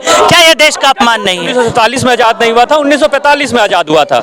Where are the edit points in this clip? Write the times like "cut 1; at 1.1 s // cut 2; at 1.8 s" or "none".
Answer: cut 1; at 1.5 s